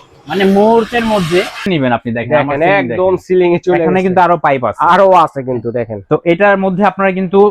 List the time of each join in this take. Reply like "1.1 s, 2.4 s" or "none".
1.7 s